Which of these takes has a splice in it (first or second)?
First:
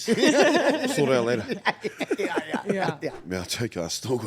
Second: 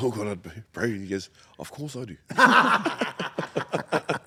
first